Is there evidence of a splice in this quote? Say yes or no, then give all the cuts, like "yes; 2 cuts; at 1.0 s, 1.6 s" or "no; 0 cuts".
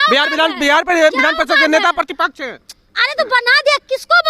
no; 0 cuts